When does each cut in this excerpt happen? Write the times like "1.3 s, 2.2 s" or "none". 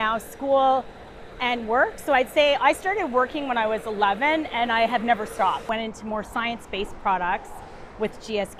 5.7 s